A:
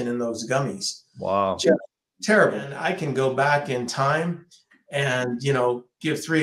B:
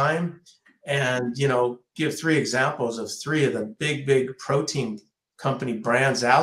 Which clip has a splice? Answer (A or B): A